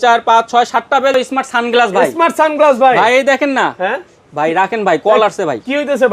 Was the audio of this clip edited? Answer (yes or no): yes